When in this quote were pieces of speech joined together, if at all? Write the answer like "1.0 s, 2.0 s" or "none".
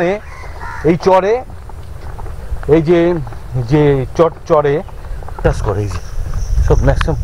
5.4 s